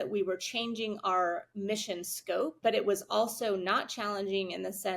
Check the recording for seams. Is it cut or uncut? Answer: cut